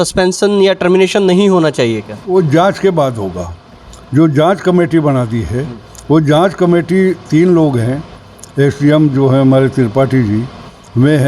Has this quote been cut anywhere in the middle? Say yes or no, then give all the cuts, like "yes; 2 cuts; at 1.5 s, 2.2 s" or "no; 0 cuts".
no; 0 cuts